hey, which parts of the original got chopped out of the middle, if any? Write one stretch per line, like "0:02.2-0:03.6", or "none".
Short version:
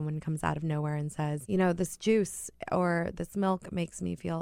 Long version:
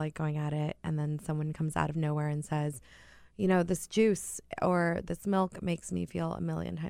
0:02.7-0:03.3